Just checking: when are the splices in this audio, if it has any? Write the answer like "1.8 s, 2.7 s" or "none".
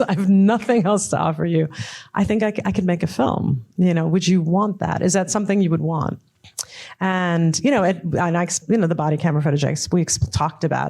6.3 s

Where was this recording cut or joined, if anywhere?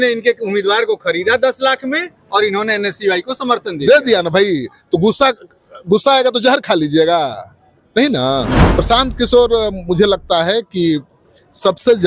8.6 s

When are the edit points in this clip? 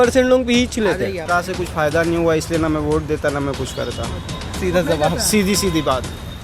1.2 s

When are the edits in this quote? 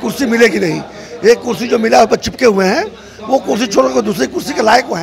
none

